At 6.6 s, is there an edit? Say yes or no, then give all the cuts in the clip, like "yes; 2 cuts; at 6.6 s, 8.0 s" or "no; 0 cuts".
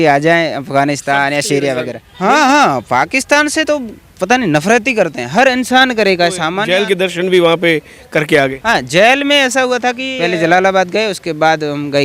yes; 3 cuts; at 2.0 s, 6.6 s, 10.1 s